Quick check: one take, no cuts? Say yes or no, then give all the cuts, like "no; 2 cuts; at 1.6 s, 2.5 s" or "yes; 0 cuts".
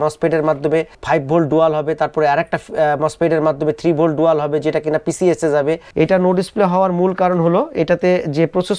no; 1 cut; at 5.9 s